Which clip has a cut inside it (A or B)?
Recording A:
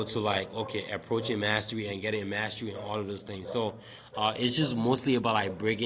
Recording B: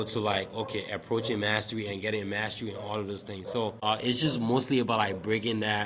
B